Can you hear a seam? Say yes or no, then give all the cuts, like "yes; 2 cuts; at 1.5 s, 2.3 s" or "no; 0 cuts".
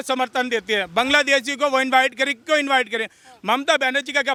no; 0 cuts